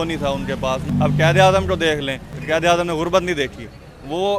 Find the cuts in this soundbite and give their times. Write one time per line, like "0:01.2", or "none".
0:00.9
0:02.3